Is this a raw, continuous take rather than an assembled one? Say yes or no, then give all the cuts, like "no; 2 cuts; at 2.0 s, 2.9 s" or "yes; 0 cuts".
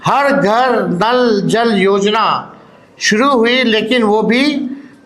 yes; 0 cuts